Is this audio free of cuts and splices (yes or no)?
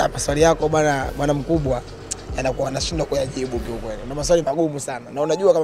yes